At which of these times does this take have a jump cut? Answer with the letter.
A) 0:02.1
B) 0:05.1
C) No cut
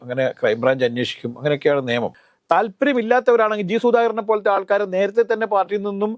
A